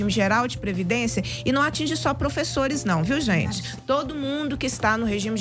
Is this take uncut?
no; 1 cut; at 3.7 s

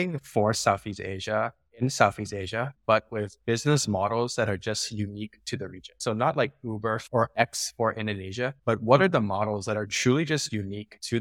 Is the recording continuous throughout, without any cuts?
yes; 0 cuts

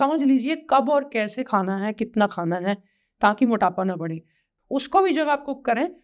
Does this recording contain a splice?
yes; 1 cut; at 4.5 s

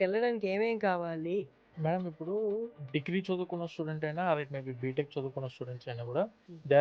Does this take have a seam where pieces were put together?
yes; 1 cut; at 1.6 s

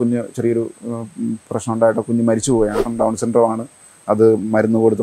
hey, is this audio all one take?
no; 1 cut; at 2.8 s

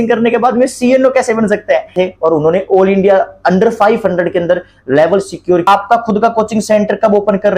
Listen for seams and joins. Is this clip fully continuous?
no; 2 cuts; at 1.9 s, 5.7 s

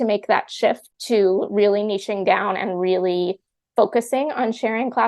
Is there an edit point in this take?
yes; 1 cut; at 0.9 s

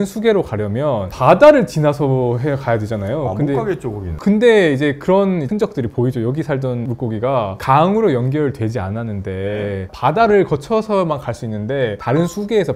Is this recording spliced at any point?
no; 0 cuts

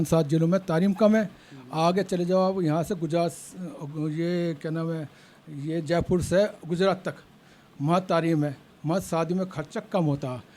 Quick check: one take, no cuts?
yes; 0 cuts

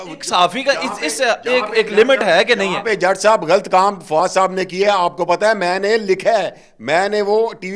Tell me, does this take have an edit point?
no; 0 cuts

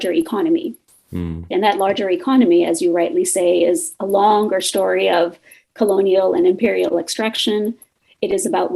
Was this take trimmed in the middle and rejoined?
yes; 1 cut; at 1.5 s

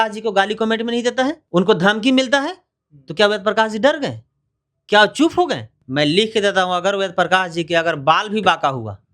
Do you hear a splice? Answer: yes; 2 cuts; at 1.4 s, 5.7 s

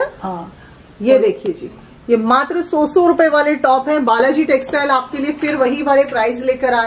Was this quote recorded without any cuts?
yes; 0 cuts

